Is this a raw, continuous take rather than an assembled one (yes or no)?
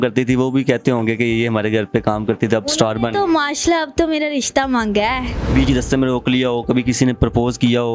no